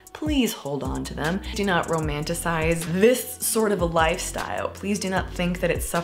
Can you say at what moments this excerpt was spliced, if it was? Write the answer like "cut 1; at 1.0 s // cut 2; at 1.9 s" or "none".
cut 1; at 1.6 s // cut 2; at 2.8 s